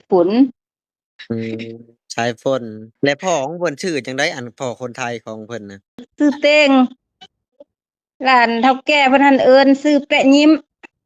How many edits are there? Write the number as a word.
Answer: two